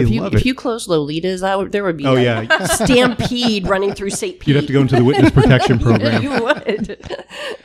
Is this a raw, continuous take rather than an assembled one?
yes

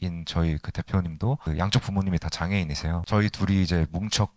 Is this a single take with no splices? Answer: no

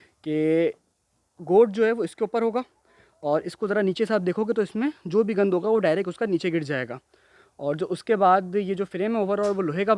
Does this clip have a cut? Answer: no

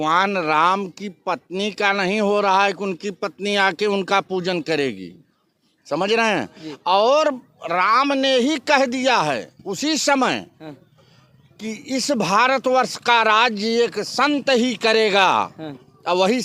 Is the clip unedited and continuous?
yes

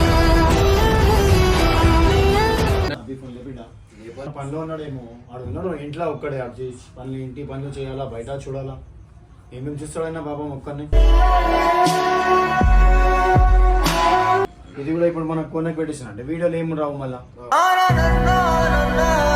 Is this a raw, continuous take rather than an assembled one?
no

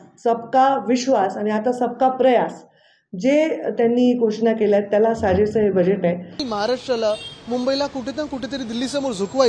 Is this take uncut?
no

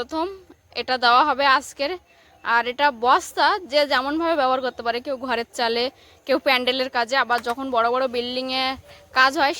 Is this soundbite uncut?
yes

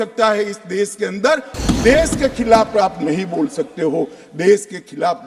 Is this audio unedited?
no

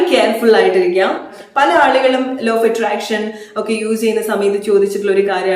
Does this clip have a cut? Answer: yes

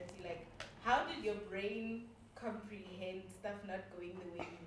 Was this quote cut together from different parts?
no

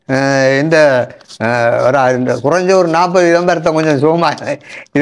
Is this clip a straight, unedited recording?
yes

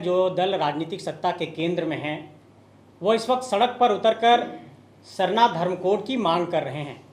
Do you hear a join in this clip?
no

